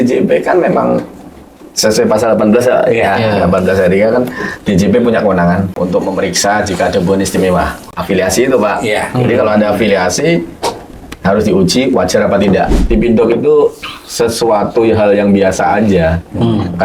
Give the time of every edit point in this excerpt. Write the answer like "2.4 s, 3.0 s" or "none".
5.7 s, 7.8 s, 12.8 s